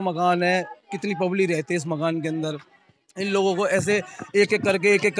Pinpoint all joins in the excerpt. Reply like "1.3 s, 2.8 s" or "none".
none